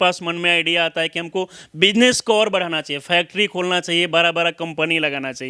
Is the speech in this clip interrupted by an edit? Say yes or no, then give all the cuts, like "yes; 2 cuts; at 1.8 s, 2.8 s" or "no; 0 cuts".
no; 0 cuts